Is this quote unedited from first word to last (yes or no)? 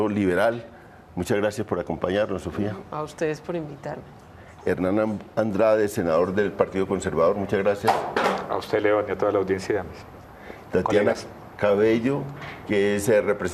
no